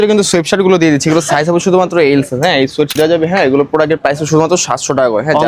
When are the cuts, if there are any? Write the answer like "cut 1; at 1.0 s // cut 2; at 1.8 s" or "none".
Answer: cut 1; at 2.9 s